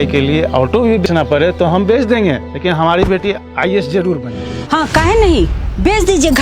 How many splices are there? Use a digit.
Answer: 2